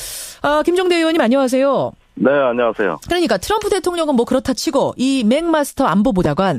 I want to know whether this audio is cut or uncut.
cut